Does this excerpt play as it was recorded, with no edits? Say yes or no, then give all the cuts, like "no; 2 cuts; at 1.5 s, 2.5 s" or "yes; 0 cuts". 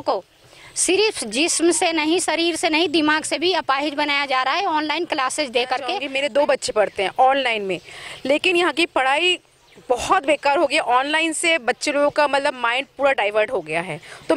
no; 1 cut; at 6.0 s